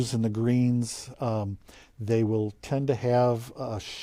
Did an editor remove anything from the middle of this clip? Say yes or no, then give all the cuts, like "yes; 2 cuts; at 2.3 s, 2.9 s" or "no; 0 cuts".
no; 0 cuts